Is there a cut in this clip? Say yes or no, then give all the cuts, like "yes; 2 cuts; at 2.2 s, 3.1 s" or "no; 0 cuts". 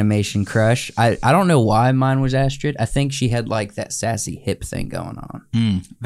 no; 0 cuts